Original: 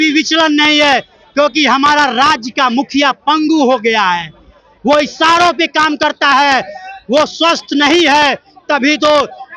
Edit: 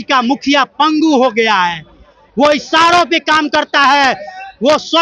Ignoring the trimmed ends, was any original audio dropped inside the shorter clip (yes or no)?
no